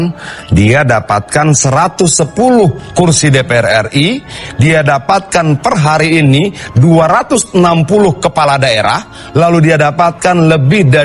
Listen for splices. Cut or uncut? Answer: uncut